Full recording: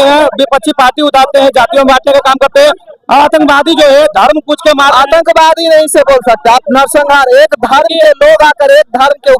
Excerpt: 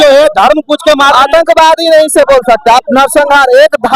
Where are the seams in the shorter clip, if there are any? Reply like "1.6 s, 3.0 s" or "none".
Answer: none